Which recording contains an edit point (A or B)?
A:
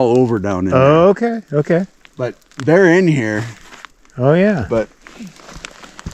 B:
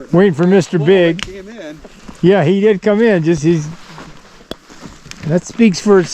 B